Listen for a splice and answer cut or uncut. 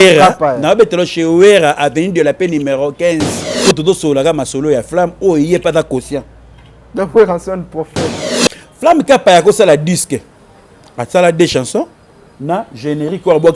cut